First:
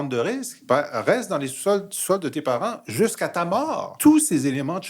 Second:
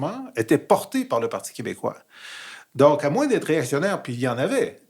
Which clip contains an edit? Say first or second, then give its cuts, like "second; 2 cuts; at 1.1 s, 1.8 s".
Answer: first; 1 cut; at 3.9 s